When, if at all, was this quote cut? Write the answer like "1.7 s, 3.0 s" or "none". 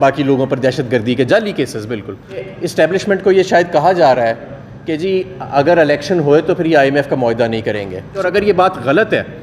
2.5 s, 8.2 s